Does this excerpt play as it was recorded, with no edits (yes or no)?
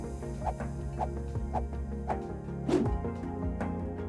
yes